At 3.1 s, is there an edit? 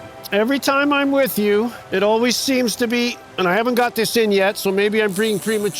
no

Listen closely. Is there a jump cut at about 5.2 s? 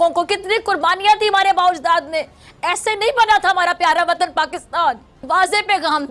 yes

